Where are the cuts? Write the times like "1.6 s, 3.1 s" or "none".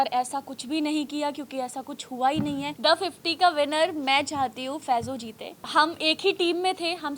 2.7 s, 5.6 s

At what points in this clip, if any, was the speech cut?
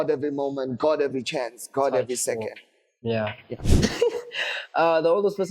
3.7 s

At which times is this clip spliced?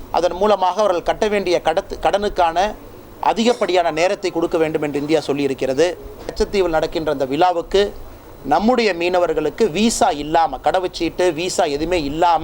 6.3 s

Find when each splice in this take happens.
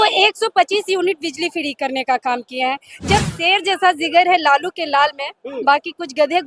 3.3 s

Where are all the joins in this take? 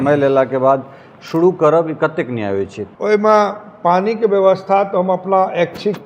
2.8 s

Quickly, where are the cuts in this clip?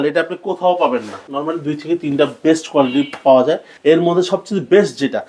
1.2 s, 3.7 s

